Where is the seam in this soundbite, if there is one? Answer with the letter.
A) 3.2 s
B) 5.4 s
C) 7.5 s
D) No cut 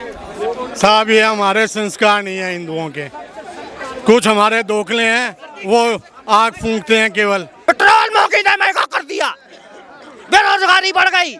C